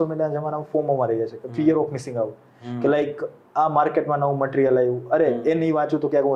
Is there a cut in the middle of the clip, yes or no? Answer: no